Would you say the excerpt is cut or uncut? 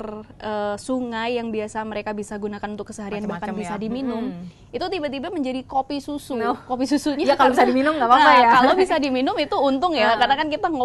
uncut